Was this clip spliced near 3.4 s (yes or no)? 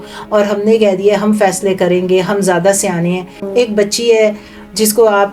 yes